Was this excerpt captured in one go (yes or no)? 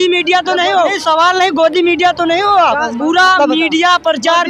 no